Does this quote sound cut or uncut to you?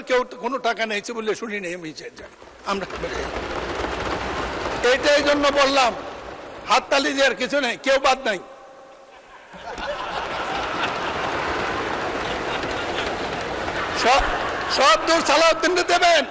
uncut